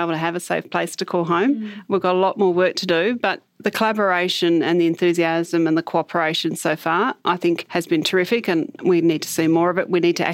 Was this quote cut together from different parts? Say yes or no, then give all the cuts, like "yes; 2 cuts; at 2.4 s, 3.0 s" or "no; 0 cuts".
yes; 1 cut; at 7.7 s